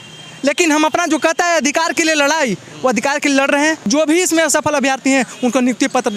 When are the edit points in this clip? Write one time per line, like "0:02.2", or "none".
0:03.9

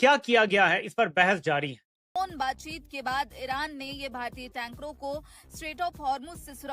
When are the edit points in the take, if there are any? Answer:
0:02.1

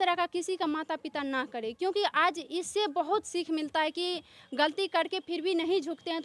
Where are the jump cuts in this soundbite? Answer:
none

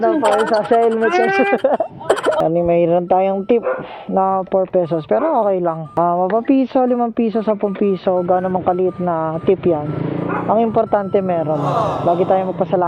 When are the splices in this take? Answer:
0:02.4

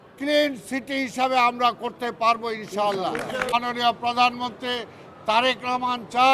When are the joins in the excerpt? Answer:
0:03.5

